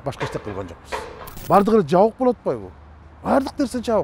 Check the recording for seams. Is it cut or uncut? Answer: cut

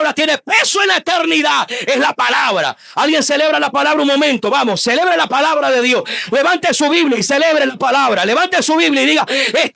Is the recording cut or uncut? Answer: uncut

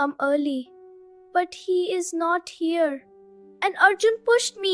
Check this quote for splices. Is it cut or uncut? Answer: uncut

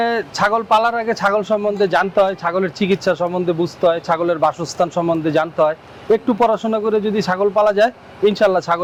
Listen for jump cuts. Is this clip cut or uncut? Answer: uncut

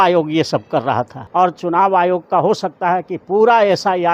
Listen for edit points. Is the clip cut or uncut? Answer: cut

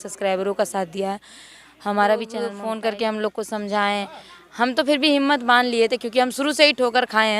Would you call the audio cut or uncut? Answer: cut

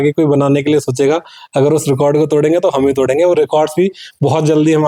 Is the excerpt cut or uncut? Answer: uncut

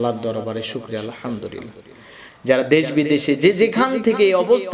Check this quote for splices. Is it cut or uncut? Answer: cut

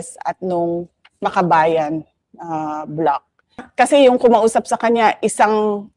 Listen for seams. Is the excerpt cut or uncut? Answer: cut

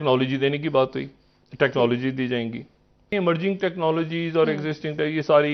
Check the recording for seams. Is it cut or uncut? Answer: cut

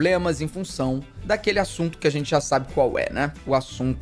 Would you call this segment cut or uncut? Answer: uncut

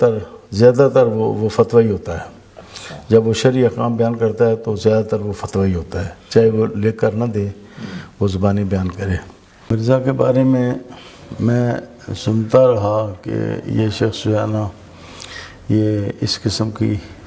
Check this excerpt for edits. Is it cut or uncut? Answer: cut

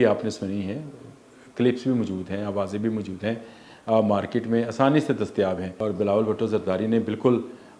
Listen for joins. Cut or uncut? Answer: cut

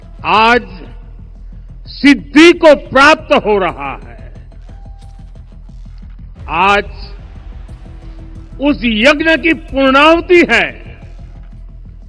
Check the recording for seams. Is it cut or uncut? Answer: cut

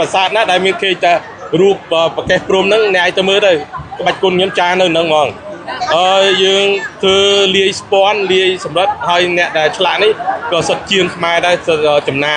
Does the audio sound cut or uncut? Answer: cut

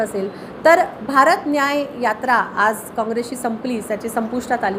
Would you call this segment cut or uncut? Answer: uncut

